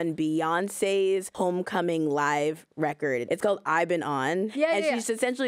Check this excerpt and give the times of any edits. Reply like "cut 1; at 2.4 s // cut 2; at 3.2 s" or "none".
cut 1; at 1.3 s // cut 2; at 3.2 s // cut 3; at 4.5 s

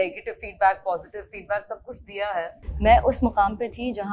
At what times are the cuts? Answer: cut 1; at 2.6 s

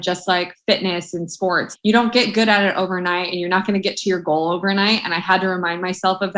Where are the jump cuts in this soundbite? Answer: cut 1; at 1.7 s

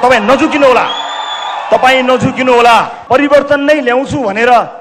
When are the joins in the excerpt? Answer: cut 1; at 2.9 s

